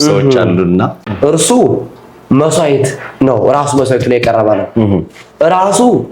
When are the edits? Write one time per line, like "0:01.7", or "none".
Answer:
0:01.0